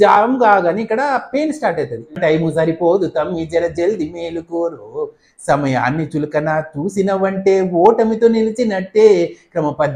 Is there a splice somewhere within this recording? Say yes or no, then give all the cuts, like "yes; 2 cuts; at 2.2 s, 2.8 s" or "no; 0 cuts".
yes; 1 cut; at 2.2 s